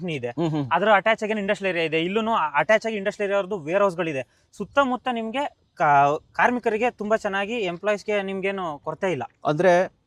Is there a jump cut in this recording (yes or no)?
no